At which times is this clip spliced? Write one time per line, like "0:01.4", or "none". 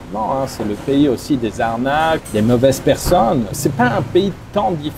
0:02.2
0:03.5